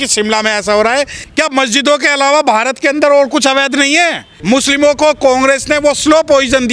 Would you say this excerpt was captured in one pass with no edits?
no; 2 cuts; at 1.2 s, 4.3 s

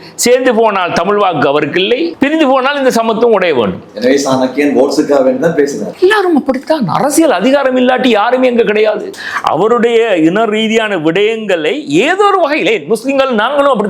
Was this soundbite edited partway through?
no; 0 cuts

